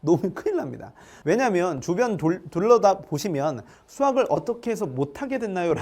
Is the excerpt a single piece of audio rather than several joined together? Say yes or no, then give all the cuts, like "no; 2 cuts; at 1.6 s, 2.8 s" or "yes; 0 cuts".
yes; 0 cuts